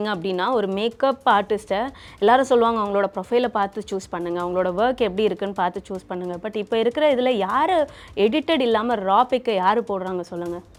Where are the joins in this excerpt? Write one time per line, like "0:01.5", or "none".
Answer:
none